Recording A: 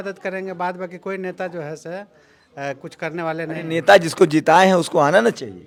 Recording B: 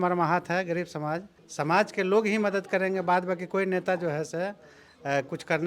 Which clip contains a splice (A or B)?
B